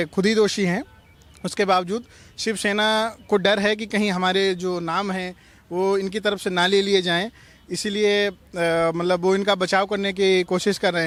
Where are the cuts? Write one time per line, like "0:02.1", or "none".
none